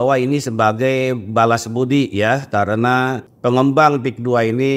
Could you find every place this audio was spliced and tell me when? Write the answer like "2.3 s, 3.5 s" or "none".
3.2 s

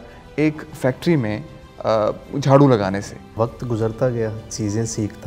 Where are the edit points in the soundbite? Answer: 3.3 s

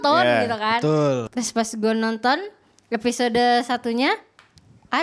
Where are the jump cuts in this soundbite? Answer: 1.2 s

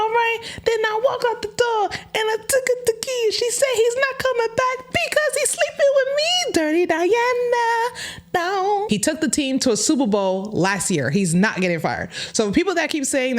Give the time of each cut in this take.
8.9 s

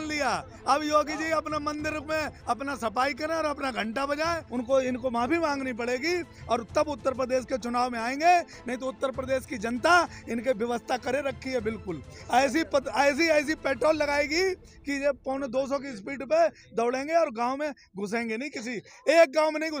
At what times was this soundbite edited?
4.5 s

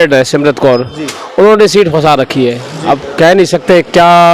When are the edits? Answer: none

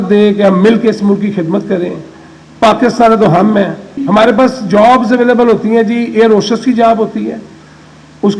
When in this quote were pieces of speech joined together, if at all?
4.0 s

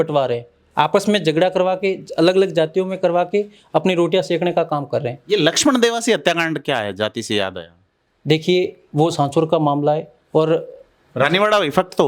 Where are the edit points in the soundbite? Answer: none

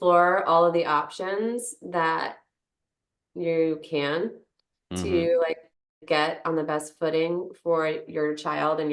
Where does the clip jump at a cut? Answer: none

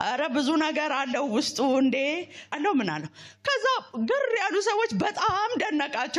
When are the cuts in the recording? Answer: 2.5 s

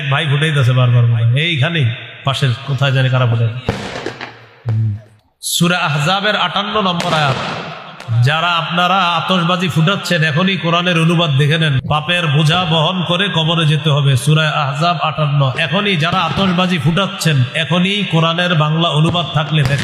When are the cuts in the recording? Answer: 5.2 s, 11.8 s

